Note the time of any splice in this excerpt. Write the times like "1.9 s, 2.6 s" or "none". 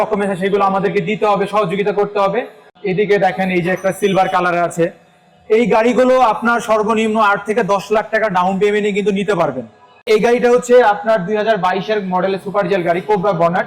2.7 s, 10.0 s